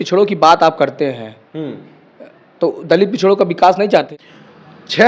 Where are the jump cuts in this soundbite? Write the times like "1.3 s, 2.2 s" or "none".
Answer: 4.1 s